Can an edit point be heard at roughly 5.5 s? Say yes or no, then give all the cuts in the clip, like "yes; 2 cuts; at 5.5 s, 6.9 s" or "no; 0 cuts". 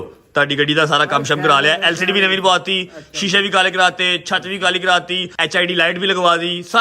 yes; 1 cut; at 5.5 s